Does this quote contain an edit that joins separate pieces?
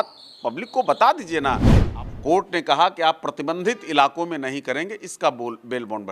yes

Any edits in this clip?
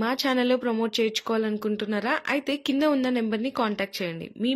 no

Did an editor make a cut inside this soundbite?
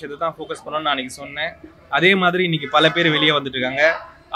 no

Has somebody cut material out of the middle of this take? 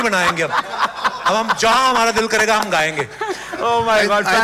no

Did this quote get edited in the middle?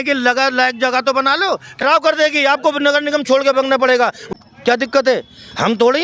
yes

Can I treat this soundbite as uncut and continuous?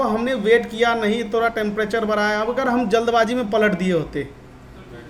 yes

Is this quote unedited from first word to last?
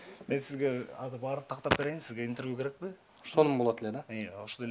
yes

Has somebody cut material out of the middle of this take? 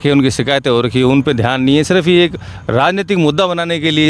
no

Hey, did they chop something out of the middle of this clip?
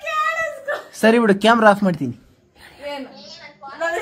no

